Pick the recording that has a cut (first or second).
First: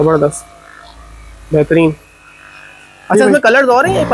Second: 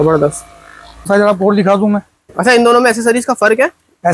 second